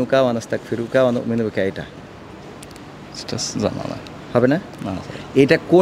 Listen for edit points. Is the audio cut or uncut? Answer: uncut